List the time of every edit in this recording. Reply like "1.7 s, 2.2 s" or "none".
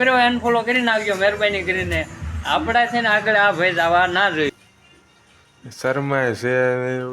4.6 s